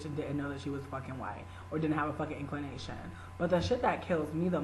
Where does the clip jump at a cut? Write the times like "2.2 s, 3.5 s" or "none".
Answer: 2.3 s